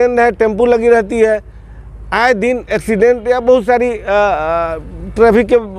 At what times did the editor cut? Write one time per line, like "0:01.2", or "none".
none